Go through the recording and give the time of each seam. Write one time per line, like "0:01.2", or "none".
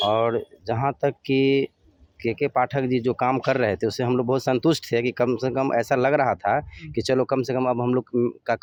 none